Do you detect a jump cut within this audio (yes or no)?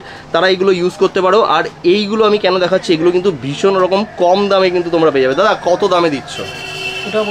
no